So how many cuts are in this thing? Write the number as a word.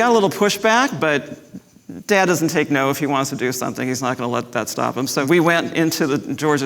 one